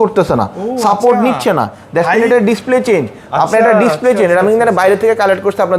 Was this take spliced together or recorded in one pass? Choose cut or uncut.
uncut